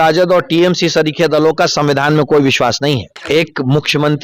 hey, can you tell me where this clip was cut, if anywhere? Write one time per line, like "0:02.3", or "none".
0:03.2